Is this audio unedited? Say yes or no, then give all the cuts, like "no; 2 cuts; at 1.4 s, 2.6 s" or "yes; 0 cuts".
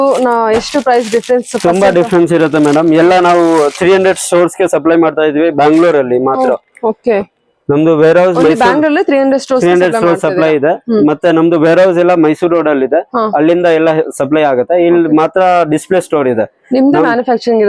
yes; 0 cuts